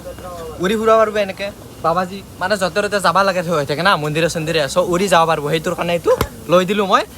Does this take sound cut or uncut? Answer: cut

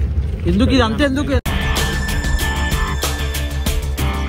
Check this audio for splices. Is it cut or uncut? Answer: uncut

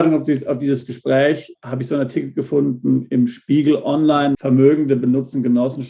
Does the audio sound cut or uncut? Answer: cut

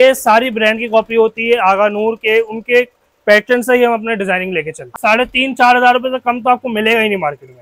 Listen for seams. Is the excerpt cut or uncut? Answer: cut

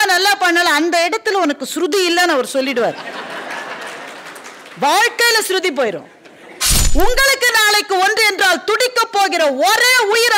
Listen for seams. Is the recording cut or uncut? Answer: cut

